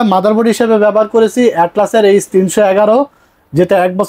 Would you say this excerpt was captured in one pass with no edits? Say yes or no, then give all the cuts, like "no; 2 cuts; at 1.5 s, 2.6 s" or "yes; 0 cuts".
yes; 0 cuts